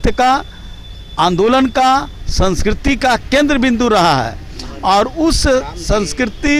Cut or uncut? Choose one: uncut